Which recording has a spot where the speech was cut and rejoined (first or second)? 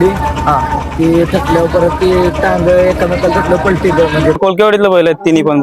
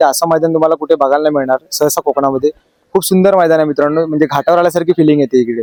first